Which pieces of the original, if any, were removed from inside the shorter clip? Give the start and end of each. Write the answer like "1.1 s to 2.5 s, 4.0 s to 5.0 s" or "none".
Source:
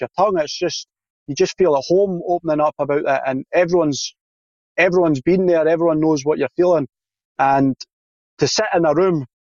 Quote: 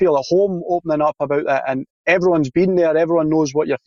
3.4 s to 4.5 s